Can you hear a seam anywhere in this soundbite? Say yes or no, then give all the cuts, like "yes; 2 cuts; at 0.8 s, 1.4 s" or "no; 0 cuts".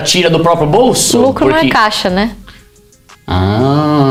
no; 0 cuts